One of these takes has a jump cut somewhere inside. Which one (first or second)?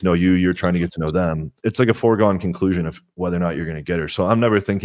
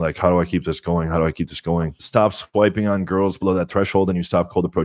second